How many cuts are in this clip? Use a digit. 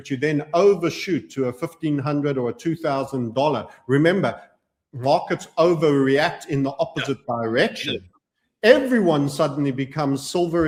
0